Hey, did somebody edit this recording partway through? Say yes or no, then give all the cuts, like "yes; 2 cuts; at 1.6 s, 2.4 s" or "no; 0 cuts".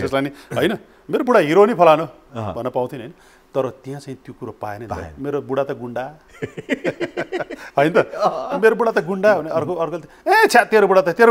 no; 0 cuts